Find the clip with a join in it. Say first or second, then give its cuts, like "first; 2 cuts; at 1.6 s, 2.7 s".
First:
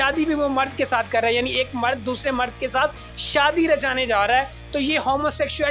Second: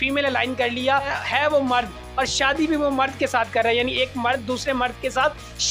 second; 1 cut; at 1.1 s